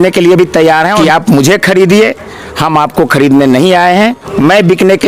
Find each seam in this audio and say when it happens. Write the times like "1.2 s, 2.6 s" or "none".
0.9 s, 4.2 s